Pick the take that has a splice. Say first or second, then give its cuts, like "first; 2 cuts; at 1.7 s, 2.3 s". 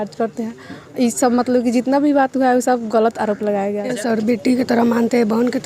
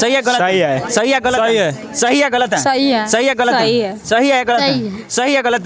first; 1 cut; at 4.0 s